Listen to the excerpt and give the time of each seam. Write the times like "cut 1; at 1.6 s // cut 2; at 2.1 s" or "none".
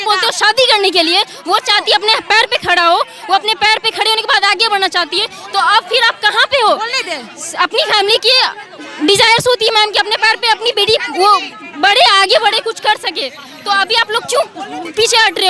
none

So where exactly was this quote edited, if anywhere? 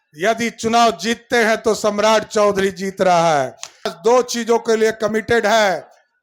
cut 1; at 3.9 s

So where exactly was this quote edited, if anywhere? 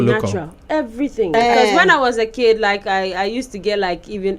cut 1; at 1.3 s

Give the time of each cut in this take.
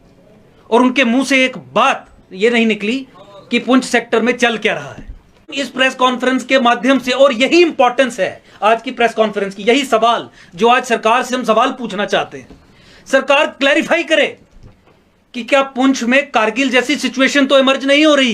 cut 1; at 5.5 s

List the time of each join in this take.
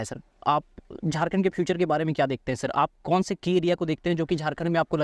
none

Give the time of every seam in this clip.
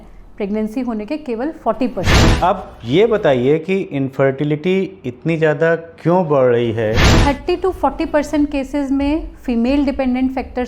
cut 1; at 2.2 s // cut 2; at 7.1 s

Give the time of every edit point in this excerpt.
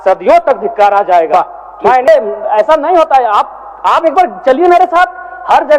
cut 1; at 2.1 s

